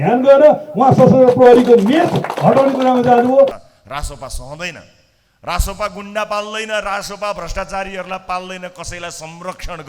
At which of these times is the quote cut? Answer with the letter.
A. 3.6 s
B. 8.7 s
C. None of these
A